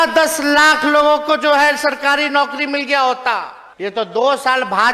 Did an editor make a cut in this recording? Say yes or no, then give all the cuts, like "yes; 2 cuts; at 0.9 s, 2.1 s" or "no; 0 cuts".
yes; 1 cut; at 3.7 s